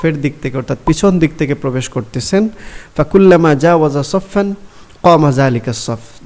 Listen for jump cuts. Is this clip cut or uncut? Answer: uncut